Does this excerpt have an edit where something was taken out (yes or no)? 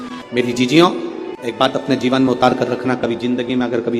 yes